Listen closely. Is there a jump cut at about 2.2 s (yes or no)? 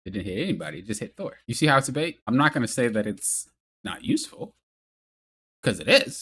yes